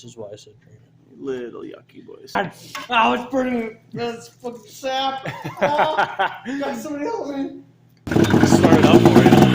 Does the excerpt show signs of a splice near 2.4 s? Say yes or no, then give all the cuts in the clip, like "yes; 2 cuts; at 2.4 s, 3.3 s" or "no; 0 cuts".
yes; 2 cuts; at 2.4 s, 7.6 s